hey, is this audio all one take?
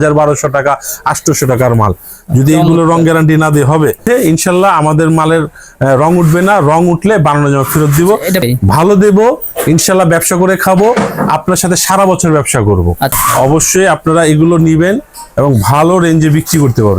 no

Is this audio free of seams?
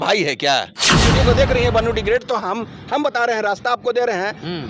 no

